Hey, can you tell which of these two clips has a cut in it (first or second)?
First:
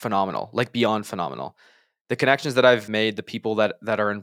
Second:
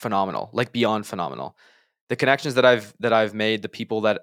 first